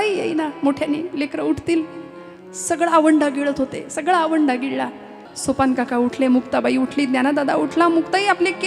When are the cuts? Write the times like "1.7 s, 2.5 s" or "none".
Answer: 5.2 s